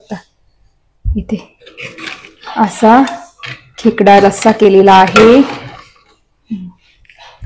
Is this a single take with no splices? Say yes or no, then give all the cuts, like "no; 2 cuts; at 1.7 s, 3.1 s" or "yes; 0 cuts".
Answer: yes; 0 cuts